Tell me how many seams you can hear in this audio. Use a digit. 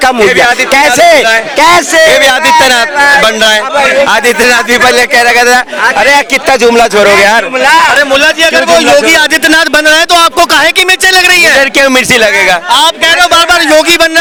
0